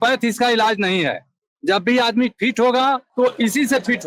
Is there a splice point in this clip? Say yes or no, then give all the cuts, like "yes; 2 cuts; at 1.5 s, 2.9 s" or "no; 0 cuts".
yes; 1 cut; at 3.1 s